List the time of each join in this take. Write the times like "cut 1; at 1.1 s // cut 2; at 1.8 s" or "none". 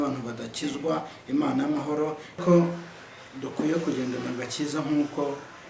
cut 1; at 2.3 s